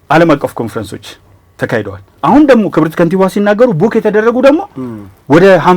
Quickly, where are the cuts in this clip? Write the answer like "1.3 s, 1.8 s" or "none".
none